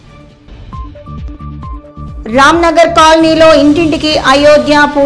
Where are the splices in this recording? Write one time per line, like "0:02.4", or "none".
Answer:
0:01.8